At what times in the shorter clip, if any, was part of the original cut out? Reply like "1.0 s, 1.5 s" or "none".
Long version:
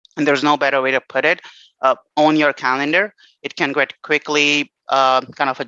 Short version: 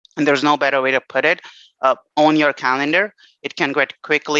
none